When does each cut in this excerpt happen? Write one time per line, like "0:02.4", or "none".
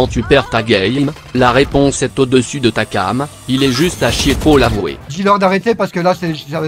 0:05.1